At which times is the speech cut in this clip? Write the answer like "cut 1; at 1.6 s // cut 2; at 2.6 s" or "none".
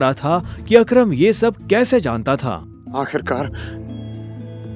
none